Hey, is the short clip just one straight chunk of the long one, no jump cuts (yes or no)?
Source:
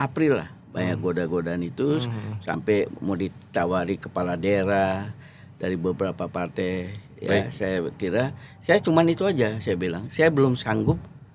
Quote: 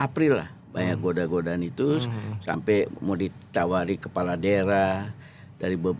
yes